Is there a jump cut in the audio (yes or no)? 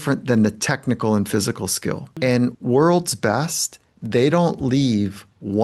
yes